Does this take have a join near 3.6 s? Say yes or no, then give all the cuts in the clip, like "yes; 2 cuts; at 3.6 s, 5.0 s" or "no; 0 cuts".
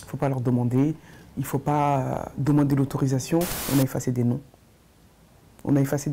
yes; 1 cut; at 3.6 s